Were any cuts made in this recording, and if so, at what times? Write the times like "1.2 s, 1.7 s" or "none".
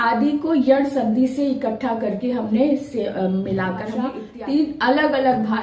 4.3 s